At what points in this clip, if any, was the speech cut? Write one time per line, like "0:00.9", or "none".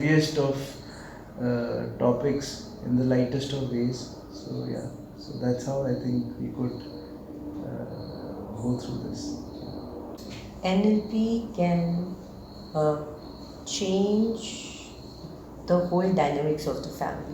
0:10.2